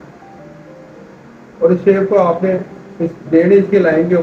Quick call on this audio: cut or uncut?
uncut